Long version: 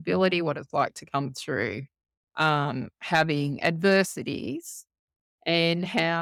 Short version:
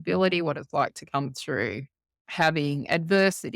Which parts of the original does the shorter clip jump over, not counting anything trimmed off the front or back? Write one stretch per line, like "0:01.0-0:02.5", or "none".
0:02.2-0:02.9